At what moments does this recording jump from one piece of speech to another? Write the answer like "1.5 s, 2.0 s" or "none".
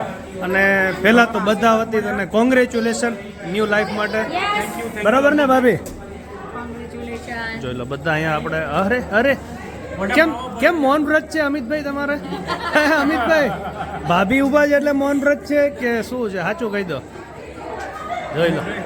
none